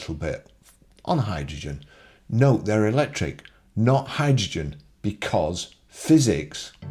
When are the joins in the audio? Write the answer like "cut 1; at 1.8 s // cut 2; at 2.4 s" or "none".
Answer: none